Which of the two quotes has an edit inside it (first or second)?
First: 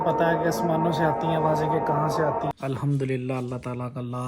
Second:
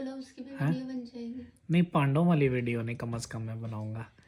first